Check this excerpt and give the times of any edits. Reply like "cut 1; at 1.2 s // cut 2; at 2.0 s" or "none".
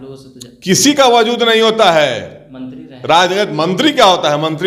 none